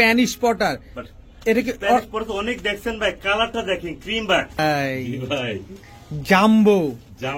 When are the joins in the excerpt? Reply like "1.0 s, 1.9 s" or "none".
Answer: 4.6 s